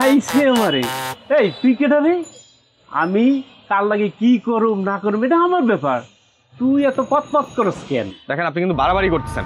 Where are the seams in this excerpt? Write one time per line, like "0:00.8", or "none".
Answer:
none